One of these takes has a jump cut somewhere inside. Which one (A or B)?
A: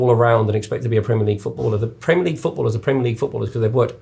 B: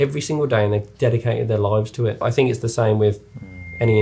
B